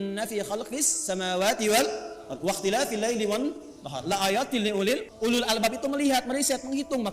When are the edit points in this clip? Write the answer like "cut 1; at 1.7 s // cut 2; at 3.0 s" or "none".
cut 1; at 5.1 s